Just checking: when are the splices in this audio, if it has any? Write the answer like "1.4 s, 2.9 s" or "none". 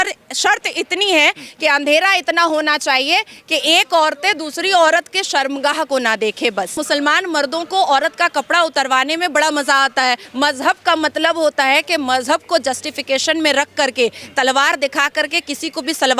6.8 s, 10.3 s